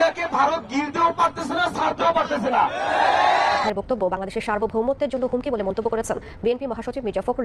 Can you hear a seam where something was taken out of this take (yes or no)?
yes